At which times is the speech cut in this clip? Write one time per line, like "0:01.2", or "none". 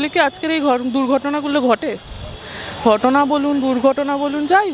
none